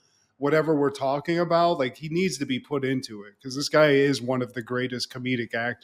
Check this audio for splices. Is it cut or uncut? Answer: uncut